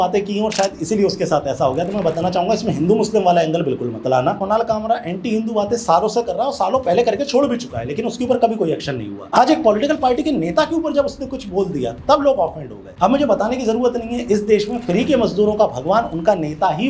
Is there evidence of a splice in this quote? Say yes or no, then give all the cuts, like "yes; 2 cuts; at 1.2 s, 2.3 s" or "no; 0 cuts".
no; 0 cuts